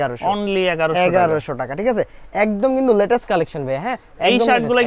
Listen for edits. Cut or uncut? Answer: uncut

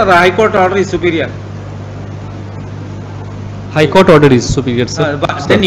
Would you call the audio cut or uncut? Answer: uncut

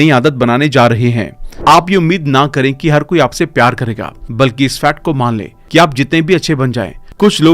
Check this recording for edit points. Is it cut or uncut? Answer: cut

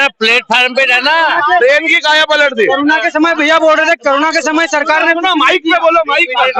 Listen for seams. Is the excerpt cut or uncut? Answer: uncut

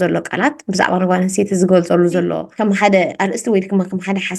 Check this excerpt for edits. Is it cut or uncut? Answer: cut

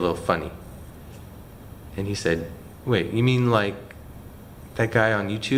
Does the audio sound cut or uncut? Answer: uncut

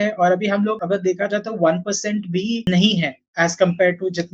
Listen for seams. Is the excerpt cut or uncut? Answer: cut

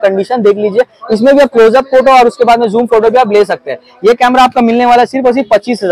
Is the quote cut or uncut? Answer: uncut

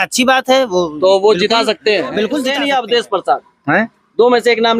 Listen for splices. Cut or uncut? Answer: cut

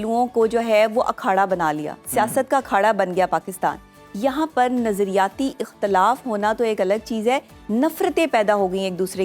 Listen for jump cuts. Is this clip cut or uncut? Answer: uncut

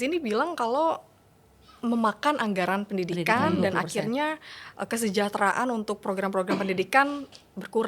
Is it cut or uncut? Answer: uncut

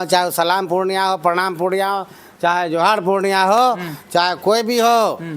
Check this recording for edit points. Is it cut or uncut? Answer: uncut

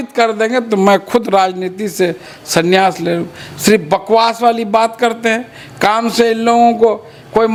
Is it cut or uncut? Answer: uncut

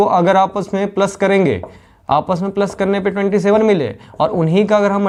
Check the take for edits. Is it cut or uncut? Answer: uncut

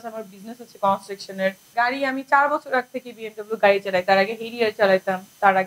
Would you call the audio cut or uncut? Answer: cut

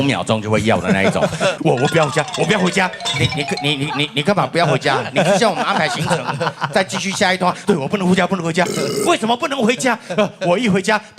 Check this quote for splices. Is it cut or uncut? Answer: cut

